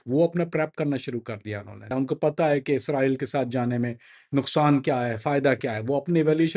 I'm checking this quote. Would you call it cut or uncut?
cut